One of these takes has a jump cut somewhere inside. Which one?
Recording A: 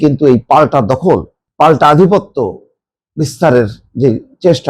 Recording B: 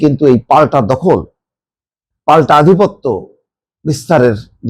A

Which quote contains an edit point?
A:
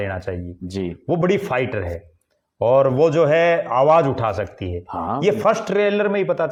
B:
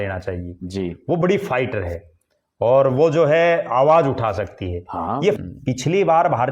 B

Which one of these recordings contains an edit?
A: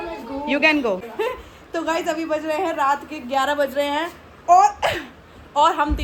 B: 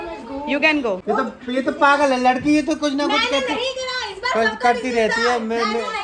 B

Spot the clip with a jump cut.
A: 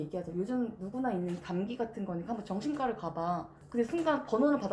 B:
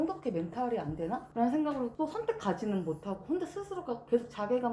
B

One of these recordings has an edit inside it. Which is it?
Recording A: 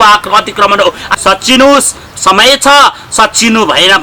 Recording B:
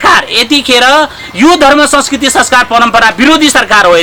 A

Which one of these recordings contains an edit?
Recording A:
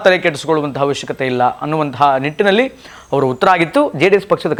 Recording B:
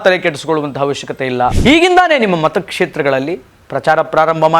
B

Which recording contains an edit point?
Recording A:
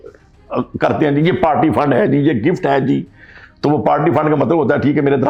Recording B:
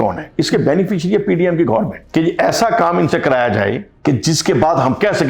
B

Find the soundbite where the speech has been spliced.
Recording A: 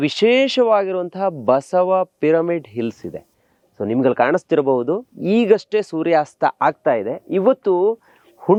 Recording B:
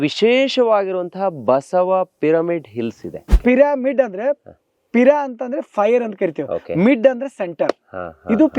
B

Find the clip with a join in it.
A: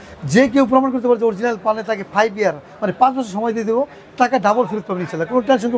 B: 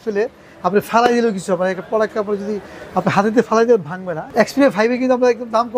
B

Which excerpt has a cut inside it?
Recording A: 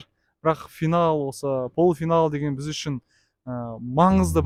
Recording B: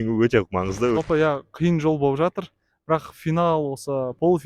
B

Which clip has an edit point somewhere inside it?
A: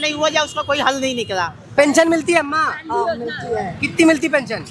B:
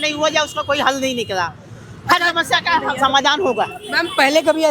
A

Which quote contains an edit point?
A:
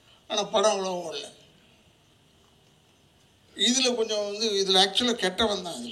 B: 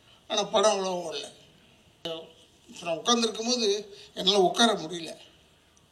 B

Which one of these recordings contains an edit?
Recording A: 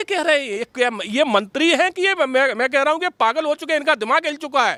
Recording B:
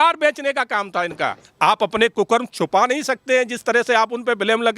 B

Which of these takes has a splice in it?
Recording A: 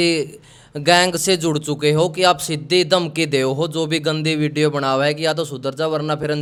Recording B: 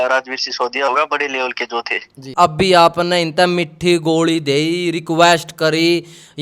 B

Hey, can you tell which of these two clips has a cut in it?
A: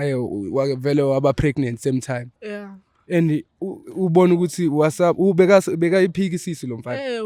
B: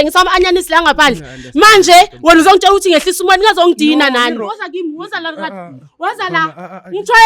B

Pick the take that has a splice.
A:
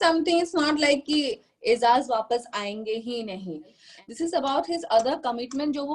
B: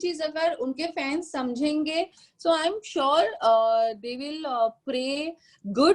A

